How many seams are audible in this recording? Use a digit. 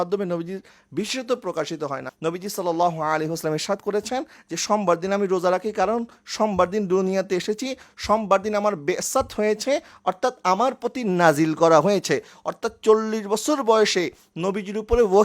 1